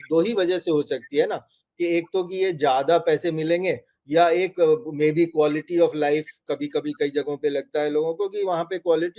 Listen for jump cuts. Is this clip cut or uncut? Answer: uncut